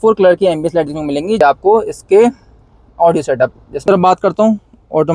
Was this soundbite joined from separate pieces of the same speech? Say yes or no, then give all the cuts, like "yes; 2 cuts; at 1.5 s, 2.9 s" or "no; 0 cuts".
yes; 2 cuts; at 1.4 s, 3.9 s